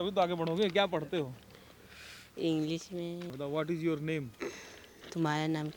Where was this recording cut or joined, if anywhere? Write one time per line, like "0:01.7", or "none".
0:03.3